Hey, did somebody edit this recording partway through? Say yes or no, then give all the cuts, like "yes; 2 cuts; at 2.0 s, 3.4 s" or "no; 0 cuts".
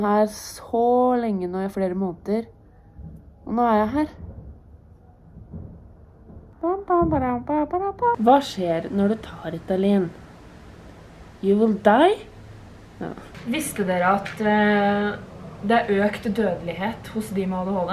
yes; 3 cuts; at 6.5 s, 8.2 s, 13.3 s